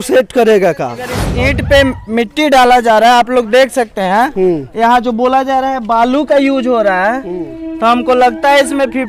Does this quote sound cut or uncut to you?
cut